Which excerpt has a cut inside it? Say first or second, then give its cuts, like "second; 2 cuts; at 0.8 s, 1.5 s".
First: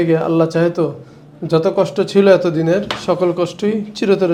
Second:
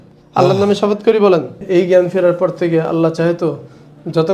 second; 1 cut; at 1.6 s